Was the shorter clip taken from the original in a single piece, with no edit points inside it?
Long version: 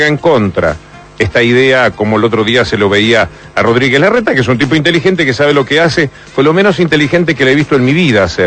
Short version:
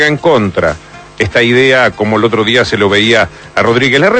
yes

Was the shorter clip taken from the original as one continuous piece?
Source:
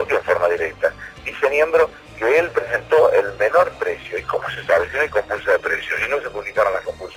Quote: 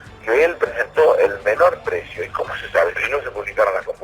no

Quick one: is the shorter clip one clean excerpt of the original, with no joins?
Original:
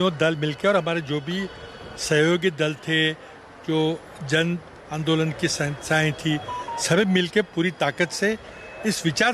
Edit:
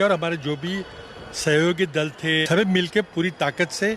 no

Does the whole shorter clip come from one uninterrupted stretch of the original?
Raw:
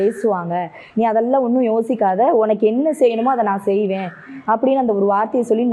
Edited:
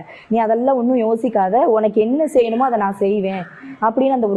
yes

